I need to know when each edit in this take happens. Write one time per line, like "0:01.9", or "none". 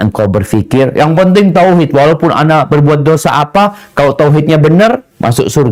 none